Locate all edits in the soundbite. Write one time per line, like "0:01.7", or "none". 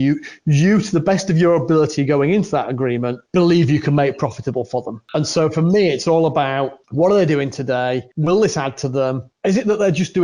0:03.2
0:05.0
0:06.8
0:08.1
0:09.3